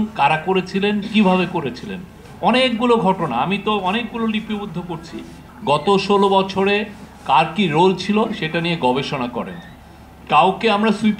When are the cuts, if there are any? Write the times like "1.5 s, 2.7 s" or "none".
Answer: 5.4 s